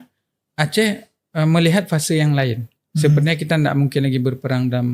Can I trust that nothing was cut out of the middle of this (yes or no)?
yes